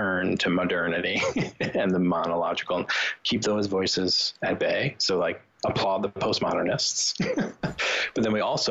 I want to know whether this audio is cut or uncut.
uncut